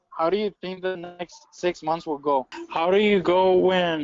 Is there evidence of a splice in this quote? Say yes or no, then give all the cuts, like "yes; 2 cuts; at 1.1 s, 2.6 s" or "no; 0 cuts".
yes; 1 cut; at 2.6 s